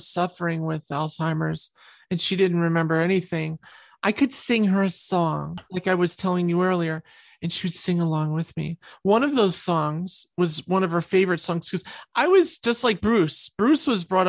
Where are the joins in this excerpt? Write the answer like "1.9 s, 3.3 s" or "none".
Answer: 5.7 s

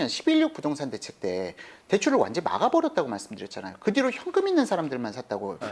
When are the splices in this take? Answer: none

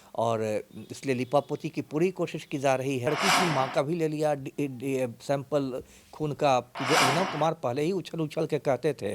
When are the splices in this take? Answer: 3.1 s, 6.8 s

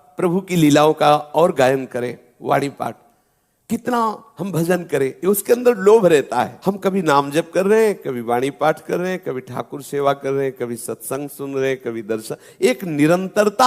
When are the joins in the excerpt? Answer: 6.6 s

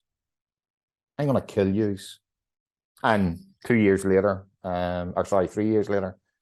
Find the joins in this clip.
none

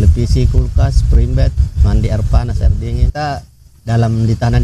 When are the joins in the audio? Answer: 3.1 s

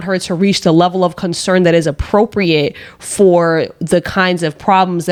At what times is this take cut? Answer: none

